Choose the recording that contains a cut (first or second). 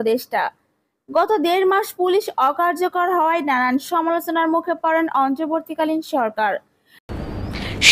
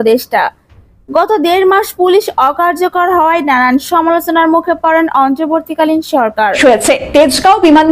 second